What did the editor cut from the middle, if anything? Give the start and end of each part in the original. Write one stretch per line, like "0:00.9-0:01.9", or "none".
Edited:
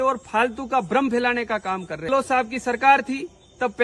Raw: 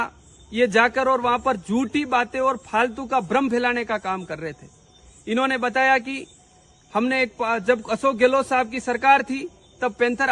0:04.5-0:08.3